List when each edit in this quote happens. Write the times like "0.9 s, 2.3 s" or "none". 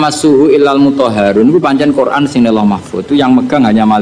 none